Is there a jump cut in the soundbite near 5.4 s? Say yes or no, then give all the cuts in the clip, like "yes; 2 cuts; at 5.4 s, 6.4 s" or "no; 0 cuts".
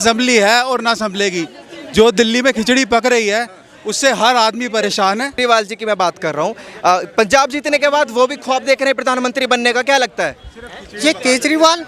yes; 1 cut; at 5.4 s